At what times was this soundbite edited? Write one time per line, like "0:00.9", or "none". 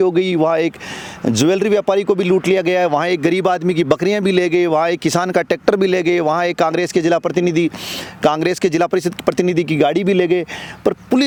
none